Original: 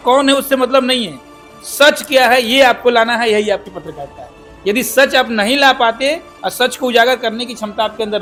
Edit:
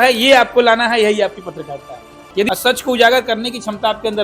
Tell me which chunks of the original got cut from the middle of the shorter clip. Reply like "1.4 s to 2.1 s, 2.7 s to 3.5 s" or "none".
4.8 s to 6.4 s